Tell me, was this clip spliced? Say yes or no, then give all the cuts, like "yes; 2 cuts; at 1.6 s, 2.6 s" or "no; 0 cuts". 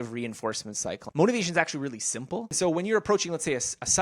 yes; 2 cuts; at 1.0 s, 2.5 s